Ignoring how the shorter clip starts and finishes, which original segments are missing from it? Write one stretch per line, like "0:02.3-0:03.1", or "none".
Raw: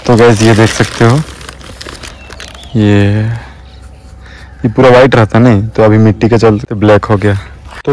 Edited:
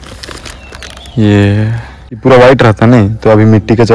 0:03.8-0:04.7